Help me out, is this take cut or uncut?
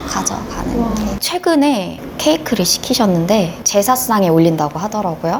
cut